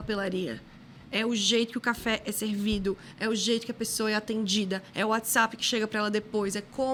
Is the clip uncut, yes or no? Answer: yes